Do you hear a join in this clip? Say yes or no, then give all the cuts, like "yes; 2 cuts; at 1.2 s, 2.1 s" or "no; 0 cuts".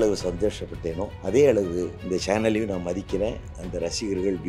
yes; 2 cuts; at 1.1 s, 2.0 s